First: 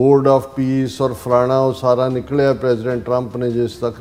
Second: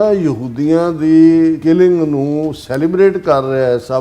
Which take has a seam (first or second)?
second